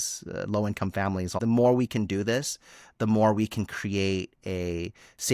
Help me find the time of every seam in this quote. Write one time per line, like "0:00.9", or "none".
0:01.3